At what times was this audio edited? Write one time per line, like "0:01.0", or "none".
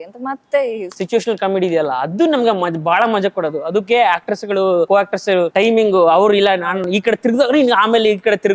0:00.9
0:05.1
0:06.7